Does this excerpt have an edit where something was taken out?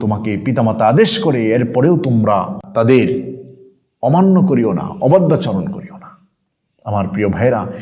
no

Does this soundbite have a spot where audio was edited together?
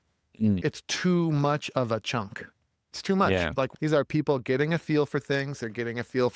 no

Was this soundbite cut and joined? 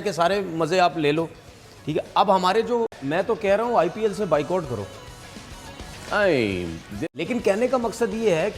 yes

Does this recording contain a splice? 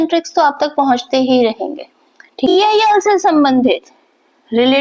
yes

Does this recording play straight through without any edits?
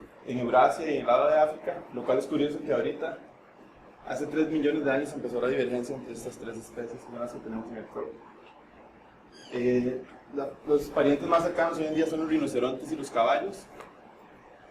no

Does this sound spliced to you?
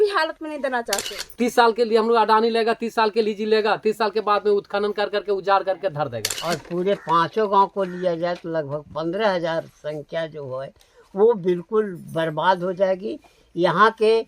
yes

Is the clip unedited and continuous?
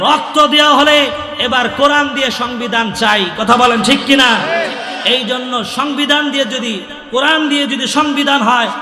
yes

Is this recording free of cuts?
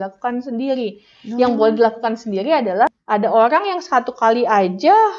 no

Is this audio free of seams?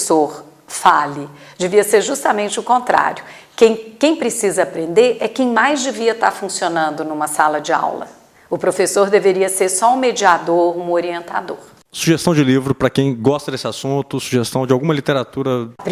yes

